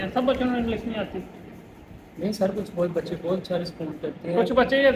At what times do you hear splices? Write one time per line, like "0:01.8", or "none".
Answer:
none